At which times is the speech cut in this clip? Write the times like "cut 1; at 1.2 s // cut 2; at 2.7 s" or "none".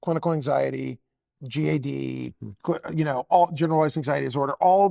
none